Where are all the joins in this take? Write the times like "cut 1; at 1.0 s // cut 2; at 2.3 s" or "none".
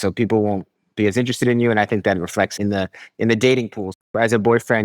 cut 1; at 2.5 s // cut 2; at 4.0 s